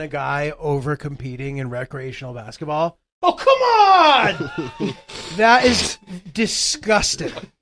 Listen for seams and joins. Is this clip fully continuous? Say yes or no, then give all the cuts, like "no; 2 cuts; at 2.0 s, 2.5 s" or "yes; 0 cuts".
yes; 0 cuts